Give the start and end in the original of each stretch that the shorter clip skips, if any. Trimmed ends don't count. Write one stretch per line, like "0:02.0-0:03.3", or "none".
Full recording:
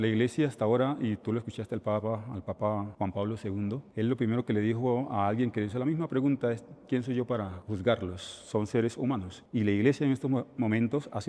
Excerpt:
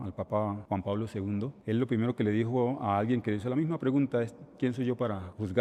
none